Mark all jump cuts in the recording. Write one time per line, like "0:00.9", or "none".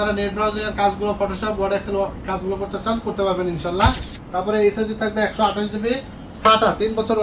0:04.1